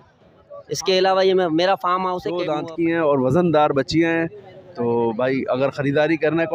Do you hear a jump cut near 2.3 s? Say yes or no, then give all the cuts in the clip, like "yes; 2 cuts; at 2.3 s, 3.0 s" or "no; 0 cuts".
yes; 1 cut; at 2.3 s